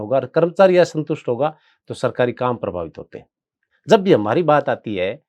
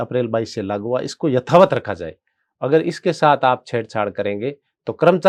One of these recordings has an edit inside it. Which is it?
first; 1 cut; at 3.7 s

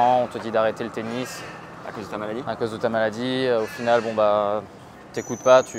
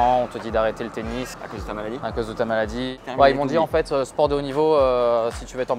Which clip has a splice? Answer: second; 2 cuts; at 1.4 s, 2.9 s

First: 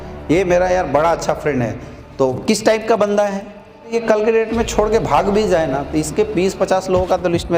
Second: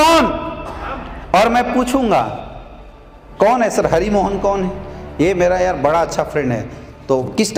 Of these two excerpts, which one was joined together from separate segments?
first; 1 cut; at 3.9 s

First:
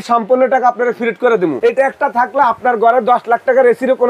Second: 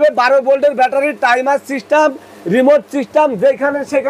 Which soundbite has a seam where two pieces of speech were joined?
first; 1 cut; at 1.6 s

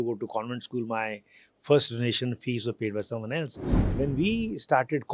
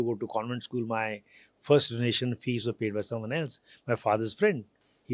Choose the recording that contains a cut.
first; 1 cut; at 3.7 s

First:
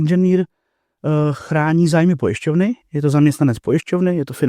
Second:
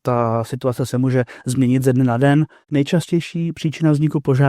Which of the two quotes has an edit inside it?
second; 1 cut; at 2.6 s

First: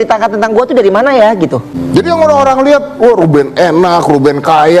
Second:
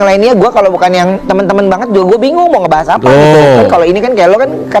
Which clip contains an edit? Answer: first; 1 cut; at 1.7 s

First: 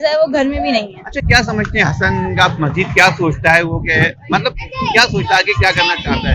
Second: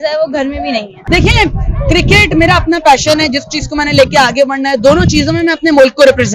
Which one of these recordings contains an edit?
second; 1 cut; at 0.9 s

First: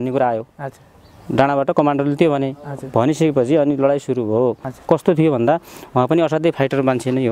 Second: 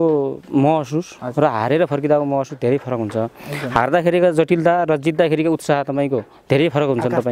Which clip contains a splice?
first; 1 cut; at 4.7 s

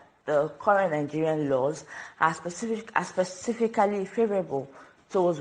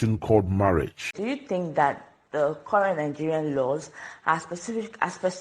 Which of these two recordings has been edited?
second; 1 cut; at 1.1 s

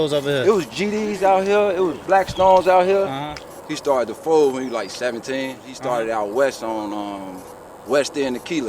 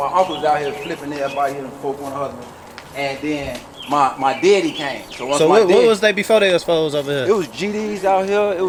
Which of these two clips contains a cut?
first; 2 cuts; at 3.2 s, 5.6 s

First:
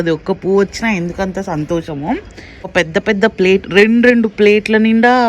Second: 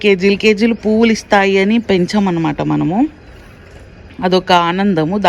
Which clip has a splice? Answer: first; 1 cut; at 2.6 s

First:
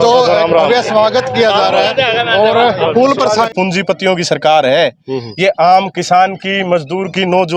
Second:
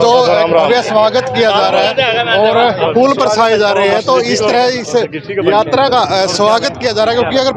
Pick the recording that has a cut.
first; 1 cut; at 3.5 s

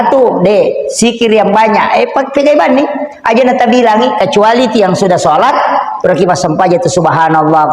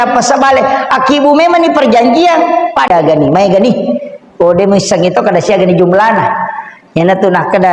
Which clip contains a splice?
second; 1 cut; at 2.9 s

